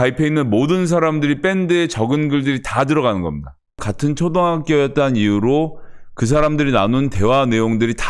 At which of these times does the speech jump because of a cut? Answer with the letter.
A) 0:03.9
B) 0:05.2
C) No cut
A